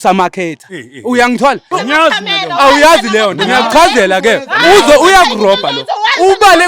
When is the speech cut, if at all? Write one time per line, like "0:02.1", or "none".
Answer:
0:01.7